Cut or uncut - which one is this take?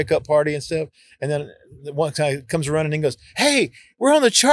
uncut